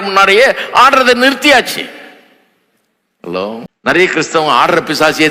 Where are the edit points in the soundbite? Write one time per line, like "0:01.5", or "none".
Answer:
0:04.0